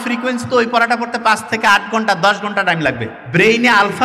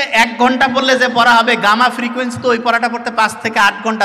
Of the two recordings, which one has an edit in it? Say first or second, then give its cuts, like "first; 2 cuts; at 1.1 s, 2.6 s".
first; 1 cut; at 3.1 s